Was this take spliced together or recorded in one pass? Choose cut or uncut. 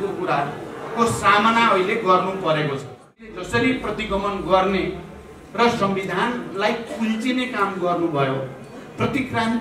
cut